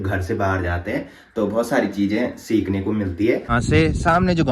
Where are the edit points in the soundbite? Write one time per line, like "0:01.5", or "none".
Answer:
0:03.5